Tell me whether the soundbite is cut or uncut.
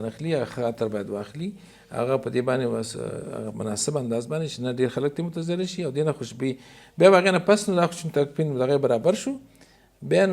uncut